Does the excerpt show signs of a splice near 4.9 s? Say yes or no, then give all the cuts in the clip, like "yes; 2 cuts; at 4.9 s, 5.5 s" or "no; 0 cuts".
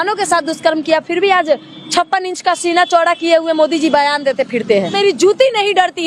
yes; 1 cut; at 4.9 s